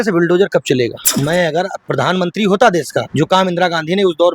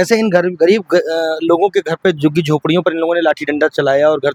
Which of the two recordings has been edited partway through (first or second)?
first